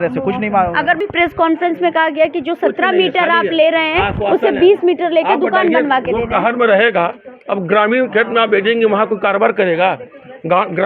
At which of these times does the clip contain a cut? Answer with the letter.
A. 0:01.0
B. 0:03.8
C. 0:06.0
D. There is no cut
A